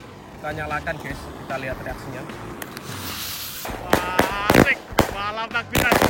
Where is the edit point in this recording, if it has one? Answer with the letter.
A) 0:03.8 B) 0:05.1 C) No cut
A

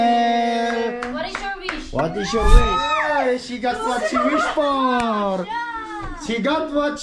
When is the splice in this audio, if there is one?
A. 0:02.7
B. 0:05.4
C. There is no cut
A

